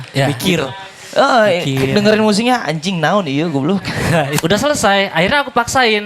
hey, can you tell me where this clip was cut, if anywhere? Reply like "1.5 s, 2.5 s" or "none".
4.4 s